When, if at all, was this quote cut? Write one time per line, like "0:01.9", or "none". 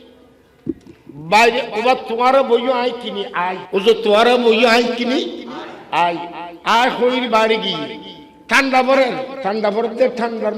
0:03.6
0:09.3